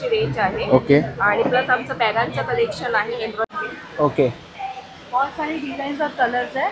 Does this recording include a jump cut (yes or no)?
yes